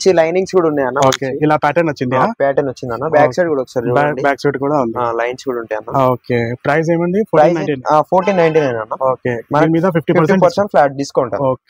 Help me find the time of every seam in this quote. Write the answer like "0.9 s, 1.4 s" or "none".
none